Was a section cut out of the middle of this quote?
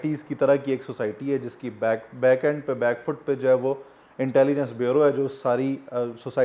no; 0 cuts

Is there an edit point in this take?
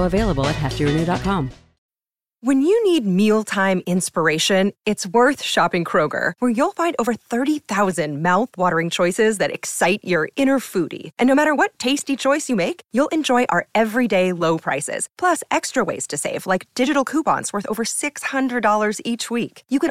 yes; 1 cut; at 1.6 s

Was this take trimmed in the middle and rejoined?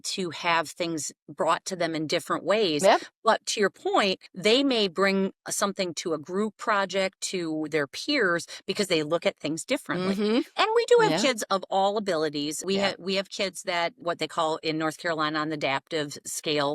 yes; 4 cuts; at 4.3 s, 10.5 s, 12.6 s, 14.0 s

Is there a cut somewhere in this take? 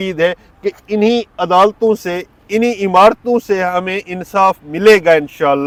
no; 0 cuts

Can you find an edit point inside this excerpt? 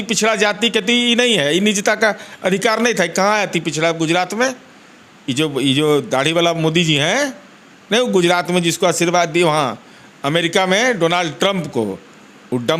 no; 0 cuts

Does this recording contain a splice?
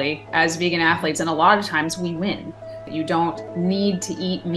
yes; 1 cut; at 2.9 s

